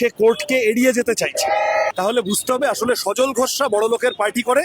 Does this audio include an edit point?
yes; 1 cut; at 1.9 s

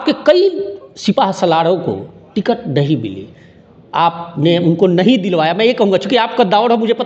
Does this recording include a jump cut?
no; 0 cuts

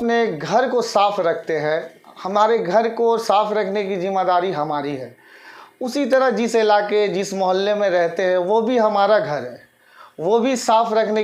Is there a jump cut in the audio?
no; 0 cuts

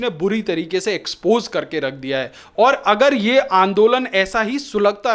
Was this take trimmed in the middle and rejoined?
no; 0 cuts

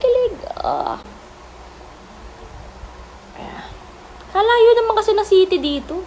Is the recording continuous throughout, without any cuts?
yes; 0 cuts

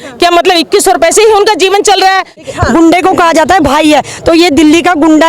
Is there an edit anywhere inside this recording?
yes; 1 cut; at 2.4 s

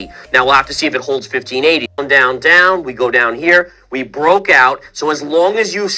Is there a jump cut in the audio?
yes; 1 cut; at 2.0 s

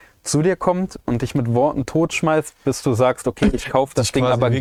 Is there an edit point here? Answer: no; 0 cuts

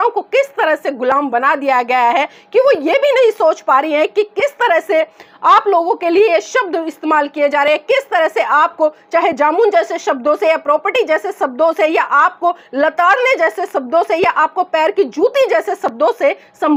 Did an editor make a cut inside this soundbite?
no; 0 cuts

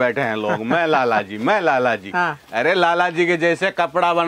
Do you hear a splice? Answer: no; 0 cuts

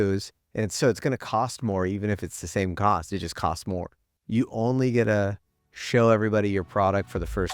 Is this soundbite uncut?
no; 1 cut; at 3.9 s

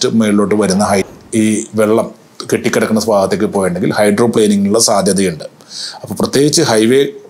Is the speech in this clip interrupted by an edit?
yes; 1 cut; at 1.1 s

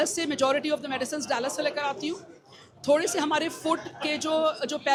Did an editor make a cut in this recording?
no; 0 cuts

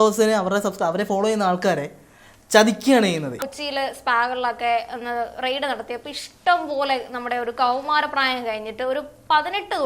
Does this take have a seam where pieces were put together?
yes; 1 cut; at 3.5 s

